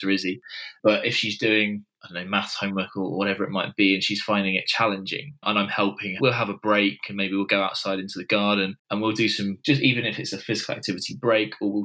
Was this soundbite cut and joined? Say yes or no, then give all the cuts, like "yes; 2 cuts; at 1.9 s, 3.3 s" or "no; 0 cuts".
yes; 1 cut; at 9.3 s